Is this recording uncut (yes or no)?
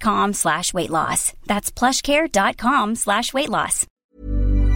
no